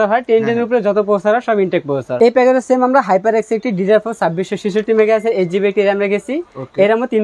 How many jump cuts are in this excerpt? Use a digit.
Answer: 1